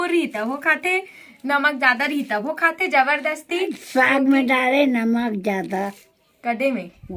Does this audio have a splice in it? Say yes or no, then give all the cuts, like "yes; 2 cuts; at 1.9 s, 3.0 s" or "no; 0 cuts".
no; 0 cuts